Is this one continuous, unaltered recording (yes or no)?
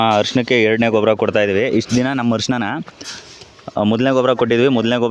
yes